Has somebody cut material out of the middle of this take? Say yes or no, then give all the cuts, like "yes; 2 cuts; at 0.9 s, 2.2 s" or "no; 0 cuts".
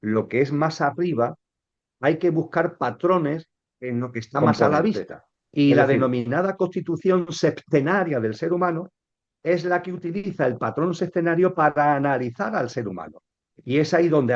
yes; 1 cut; at 4.9 s